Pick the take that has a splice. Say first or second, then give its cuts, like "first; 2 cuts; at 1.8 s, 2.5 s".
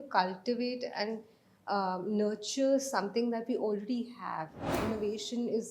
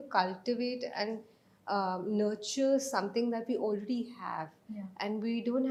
first; 1 cut; at 4.8 s